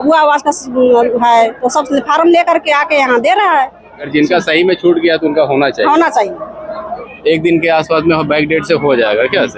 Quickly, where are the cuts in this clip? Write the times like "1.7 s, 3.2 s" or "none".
4.1 s, 7.1 s